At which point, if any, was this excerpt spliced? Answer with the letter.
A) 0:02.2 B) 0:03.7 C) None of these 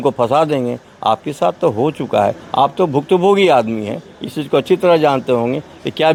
C